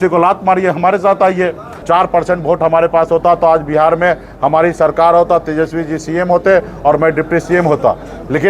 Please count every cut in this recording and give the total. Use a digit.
1